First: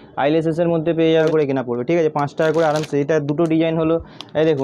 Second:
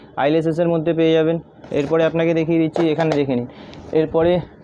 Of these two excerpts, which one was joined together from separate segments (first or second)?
first